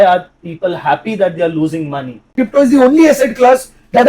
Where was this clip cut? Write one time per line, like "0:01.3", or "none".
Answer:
0:02.4